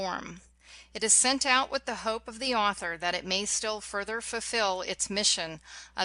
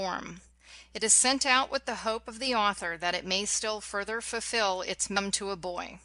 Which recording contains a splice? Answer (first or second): first